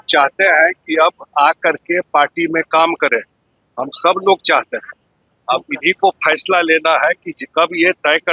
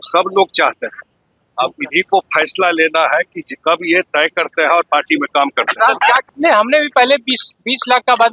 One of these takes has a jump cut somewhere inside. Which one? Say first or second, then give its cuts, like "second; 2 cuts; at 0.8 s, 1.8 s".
second; 1 cut; at 6.2 s